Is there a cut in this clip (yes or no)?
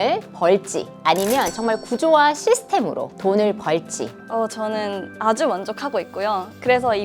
yes